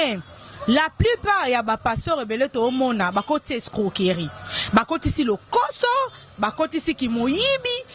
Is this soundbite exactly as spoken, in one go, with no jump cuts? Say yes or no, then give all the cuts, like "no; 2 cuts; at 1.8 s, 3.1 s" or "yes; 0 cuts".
yes; 0 cuts